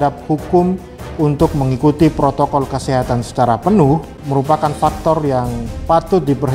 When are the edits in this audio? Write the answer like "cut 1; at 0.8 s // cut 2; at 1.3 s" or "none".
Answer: cut 1; at 4.2 s